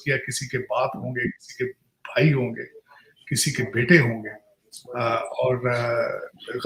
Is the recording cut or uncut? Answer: uncut